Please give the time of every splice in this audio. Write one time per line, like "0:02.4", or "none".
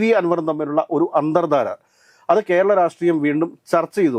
none